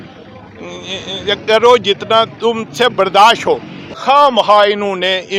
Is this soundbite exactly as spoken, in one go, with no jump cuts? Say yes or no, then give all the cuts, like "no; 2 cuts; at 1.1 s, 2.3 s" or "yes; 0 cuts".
no; 1 cut; at 3.8 s